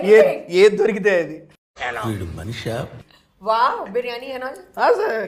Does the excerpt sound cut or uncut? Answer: uncut